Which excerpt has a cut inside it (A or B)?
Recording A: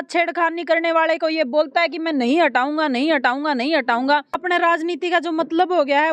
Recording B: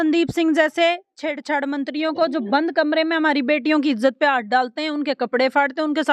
A